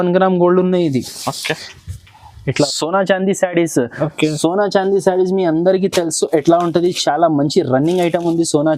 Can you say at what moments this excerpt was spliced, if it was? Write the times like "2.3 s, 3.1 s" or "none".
2.5 s